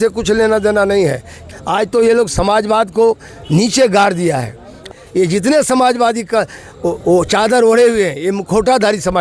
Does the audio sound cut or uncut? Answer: cut